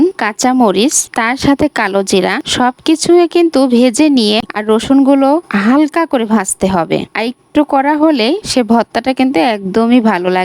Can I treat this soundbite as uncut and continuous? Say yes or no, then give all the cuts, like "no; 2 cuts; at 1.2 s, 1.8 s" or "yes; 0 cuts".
no; 1 cut; at 4.5 s